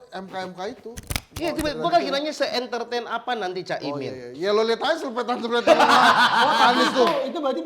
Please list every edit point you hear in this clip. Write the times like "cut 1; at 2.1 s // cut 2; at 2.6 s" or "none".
cut 1; at 1.2 s